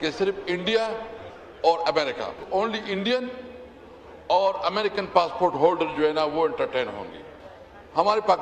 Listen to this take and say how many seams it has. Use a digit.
0